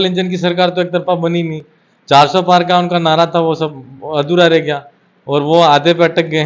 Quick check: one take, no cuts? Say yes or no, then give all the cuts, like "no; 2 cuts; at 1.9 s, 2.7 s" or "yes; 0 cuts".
yes; 0 cuts